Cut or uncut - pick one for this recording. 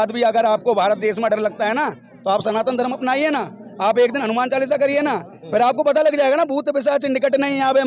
uncut